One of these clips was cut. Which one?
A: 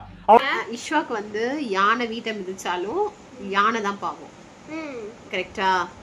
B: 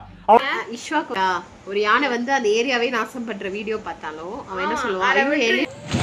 B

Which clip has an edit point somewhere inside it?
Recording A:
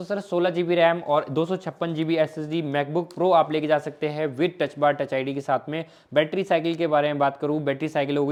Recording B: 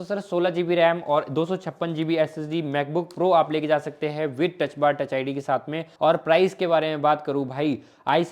B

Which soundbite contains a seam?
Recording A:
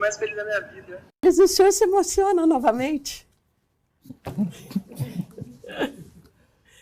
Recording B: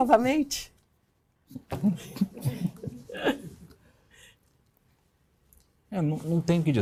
A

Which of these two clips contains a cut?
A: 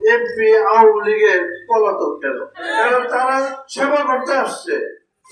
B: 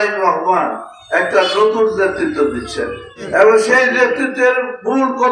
A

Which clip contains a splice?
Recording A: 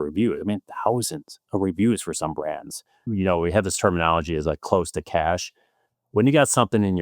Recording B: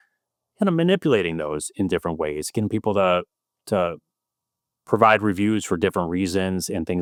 A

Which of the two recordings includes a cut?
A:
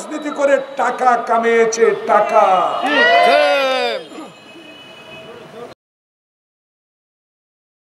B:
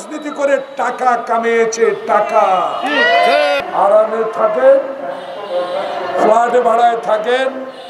B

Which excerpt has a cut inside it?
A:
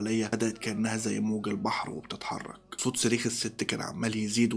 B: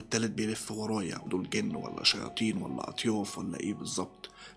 B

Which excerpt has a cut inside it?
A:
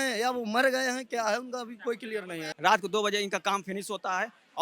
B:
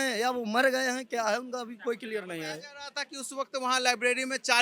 A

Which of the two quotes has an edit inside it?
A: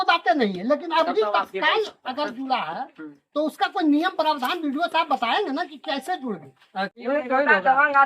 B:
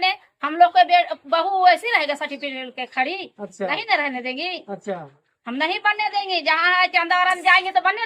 A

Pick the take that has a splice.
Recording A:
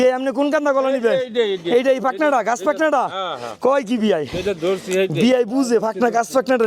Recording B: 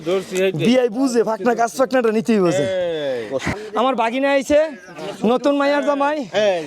B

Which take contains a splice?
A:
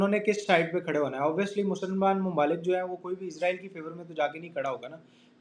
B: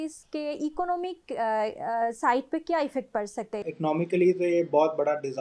B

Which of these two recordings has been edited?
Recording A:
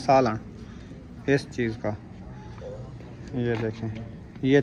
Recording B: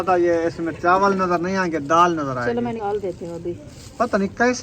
B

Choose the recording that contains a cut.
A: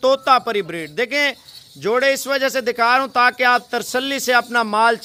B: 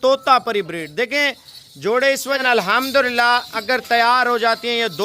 B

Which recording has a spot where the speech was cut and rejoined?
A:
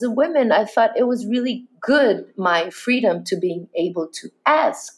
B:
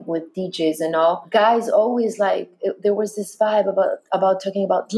B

